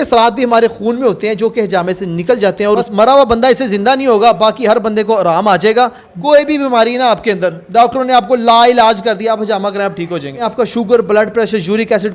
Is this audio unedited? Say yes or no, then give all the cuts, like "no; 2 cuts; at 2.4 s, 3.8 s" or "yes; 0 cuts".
no; 3 cuts; at 2.6 s, 6.1 s, 10.4 s